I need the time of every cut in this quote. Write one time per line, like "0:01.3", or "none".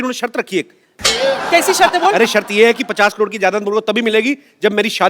0:01.0